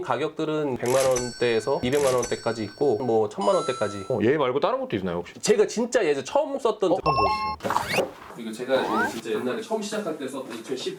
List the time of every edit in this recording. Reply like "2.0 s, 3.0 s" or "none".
0.8 s, 1.8 s, 3.0 s, 7.0 s, 8.3 s

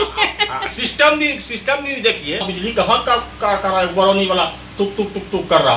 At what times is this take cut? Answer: 2.5 s

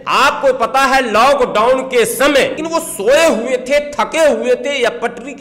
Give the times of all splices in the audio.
2.6 s

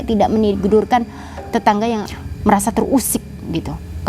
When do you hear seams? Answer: 2.1 s

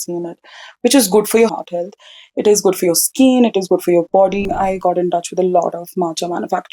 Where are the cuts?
1.5 s, 4.5 s

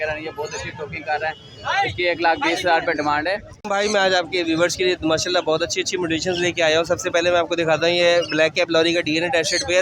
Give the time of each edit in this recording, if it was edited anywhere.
3.7 s

